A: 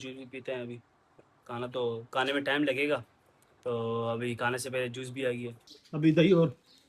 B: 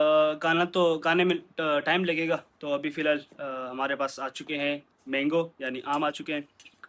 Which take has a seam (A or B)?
A